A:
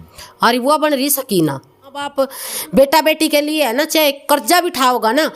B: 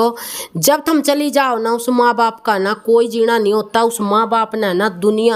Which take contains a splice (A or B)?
A